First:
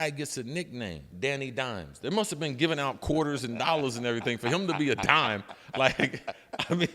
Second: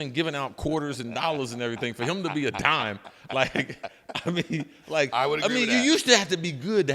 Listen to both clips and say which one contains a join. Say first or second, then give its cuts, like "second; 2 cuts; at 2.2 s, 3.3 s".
first; 1 cut; at 1.1 s